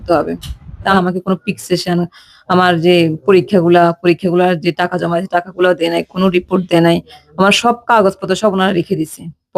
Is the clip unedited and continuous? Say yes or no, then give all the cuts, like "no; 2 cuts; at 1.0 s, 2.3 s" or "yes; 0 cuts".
no; 1 cut; at 0.9 s